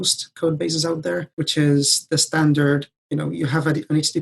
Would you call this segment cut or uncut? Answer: cut